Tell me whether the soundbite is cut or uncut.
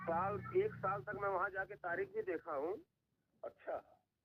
uncut